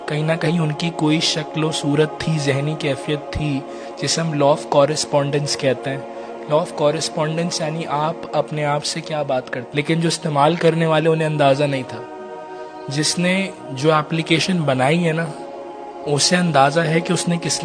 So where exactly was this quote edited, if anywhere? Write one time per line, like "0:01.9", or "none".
0:09.7